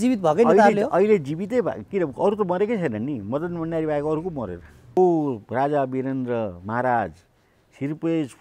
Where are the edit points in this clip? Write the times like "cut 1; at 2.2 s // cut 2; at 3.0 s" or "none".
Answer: cut 1; at 5.0 s